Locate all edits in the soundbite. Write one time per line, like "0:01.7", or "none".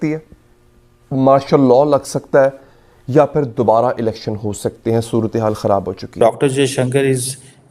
0:06.2